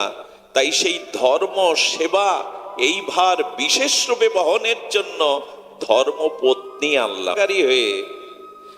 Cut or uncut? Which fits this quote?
cut